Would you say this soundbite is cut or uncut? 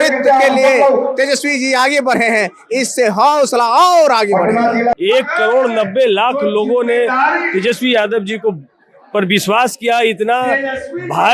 cut